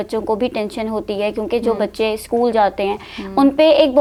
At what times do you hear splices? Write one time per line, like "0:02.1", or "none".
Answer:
none